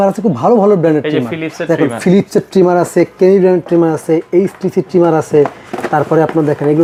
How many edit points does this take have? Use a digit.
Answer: 0